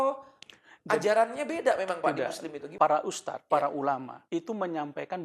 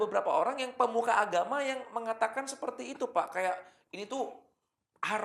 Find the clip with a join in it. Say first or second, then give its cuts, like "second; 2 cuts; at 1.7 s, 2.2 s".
first; 3 cuts; at 2.6 s, 3.3 s, 4.1 s